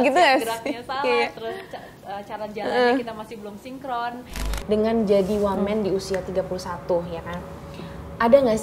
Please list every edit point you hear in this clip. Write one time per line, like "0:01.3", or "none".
0:04.5